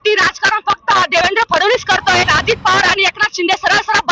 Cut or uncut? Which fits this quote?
cut